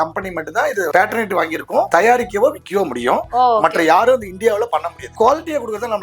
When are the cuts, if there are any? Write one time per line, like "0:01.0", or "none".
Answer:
0:05.1